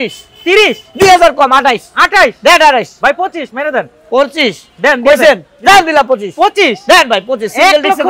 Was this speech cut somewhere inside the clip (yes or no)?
no